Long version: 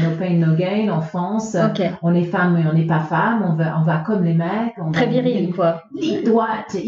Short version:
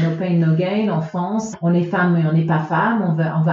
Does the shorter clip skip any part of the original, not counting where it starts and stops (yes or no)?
yes